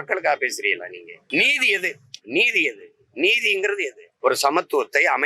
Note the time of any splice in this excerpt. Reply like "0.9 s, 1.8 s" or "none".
1.1 s, 4.1 s